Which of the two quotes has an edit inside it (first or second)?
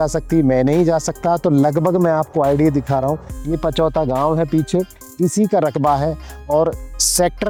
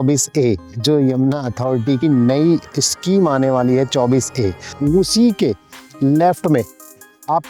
second